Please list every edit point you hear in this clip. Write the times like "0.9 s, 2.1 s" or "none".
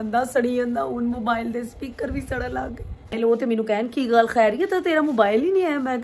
3.2 s